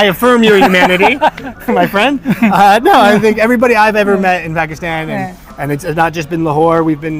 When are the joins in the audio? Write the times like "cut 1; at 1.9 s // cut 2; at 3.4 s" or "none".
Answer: none